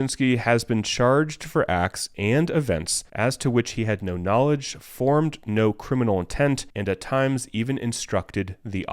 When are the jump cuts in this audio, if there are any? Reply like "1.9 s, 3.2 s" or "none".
3.0 s, 6.7 s